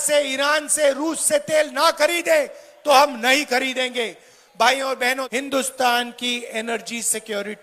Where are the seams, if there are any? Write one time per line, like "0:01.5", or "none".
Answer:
0:05.3